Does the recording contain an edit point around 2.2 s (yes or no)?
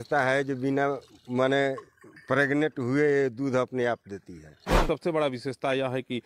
no